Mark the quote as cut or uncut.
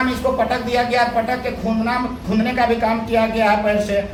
uncut